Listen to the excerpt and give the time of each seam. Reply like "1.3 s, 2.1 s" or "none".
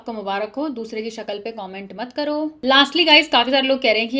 2.6 s